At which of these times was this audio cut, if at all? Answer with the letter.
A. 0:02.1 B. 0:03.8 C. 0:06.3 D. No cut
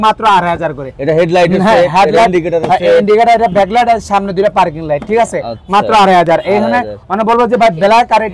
D